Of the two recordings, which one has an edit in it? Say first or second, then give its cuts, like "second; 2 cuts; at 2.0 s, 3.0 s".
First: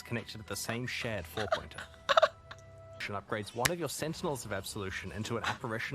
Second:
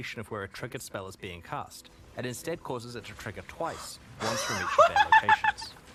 first; 1 cut; at 3.0 s